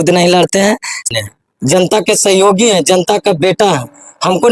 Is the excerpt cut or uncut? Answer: cut